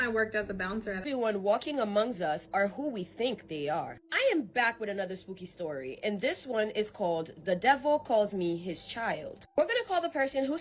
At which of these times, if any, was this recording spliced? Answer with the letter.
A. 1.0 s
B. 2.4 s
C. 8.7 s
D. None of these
A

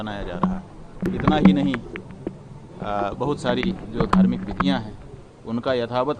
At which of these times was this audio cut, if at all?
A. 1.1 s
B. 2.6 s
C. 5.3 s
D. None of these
A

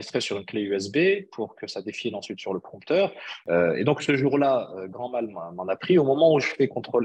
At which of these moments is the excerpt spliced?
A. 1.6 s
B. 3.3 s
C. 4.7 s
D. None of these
B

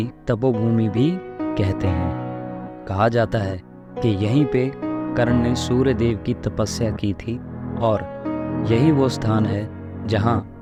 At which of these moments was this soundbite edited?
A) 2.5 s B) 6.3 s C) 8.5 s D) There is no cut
D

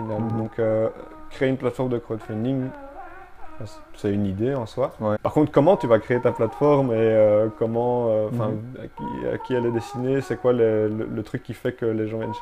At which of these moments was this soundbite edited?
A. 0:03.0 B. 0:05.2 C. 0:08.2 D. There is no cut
B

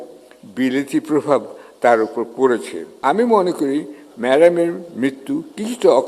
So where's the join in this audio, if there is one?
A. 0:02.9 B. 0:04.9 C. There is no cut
A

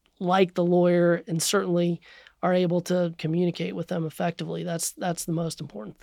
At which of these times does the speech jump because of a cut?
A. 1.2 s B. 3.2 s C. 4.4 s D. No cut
B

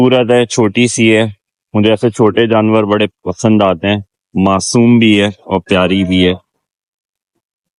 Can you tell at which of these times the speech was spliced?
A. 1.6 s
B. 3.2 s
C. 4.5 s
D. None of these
D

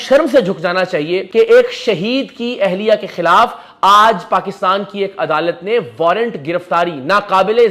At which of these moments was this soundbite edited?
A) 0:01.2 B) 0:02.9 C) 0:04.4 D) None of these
A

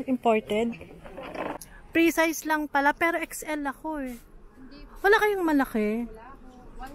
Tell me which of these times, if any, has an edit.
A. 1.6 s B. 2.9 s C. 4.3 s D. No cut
A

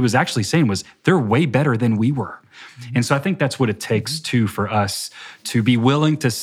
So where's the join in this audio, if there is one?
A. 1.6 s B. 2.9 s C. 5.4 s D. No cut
C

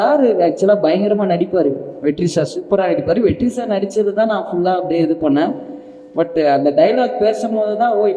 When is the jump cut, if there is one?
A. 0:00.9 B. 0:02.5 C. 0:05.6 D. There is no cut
D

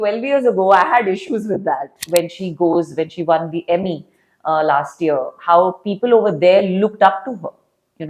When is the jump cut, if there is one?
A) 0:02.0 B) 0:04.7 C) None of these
A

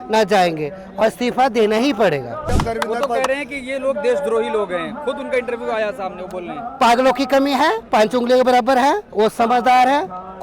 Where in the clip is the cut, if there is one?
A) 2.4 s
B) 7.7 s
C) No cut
A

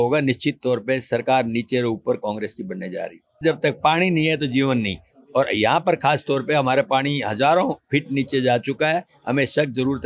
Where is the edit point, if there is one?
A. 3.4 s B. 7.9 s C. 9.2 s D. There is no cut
A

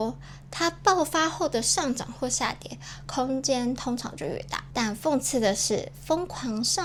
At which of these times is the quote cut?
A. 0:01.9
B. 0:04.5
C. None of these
C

